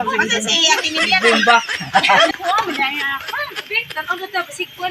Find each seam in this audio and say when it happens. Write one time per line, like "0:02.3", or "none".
0:02.3